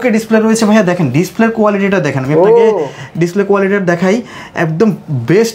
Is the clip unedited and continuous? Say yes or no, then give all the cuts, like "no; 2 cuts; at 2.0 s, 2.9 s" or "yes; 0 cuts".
yes; 0 cuts